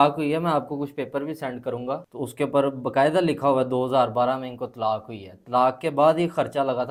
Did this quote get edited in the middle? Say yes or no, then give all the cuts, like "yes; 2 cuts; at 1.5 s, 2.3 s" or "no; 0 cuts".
no; 0 cuts